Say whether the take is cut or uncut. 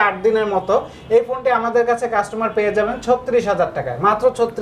uncut